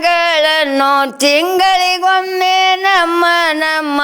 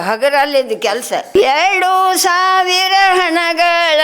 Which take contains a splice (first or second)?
second